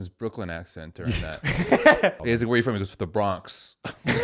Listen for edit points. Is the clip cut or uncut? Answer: cut